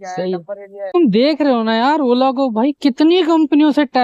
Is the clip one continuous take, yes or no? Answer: no